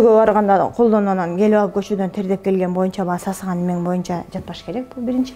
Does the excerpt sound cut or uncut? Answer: uncut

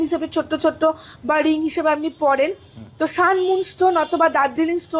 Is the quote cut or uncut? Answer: uncut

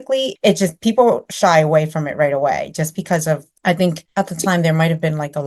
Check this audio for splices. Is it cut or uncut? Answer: uncut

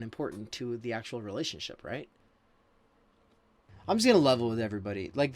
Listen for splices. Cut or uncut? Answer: cut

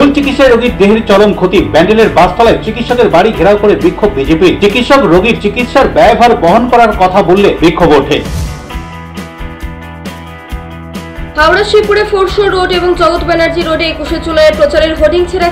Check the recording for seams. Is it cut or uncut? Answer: uncut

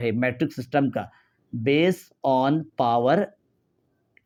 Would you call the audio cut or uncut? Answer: uncut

